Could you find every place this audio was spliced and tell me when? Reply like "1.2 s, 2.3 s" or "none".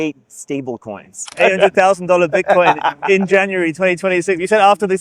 1.3 s